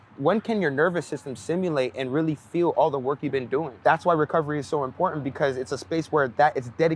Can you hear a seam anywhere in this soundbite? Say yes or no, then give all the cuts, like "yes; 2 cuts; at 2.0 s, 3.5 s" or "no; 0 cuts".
yes; 1 cut; at 3.7 s